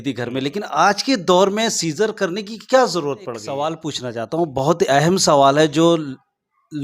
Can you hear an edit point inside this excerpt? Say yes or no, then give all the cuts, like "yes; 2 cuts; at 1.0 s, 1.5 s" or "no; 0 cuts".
yes; 1 cut; at 3.4 s